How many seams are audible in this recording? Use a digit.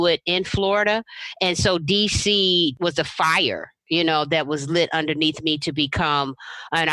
1